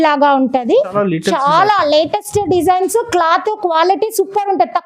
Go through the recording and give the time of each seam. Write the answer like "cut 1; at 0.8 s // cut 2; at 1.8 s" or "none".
cut 1; at 0.9 s